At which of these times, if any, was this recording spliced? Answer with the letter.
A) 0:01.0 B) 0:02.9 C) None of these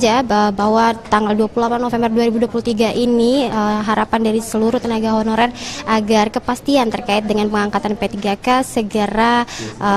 C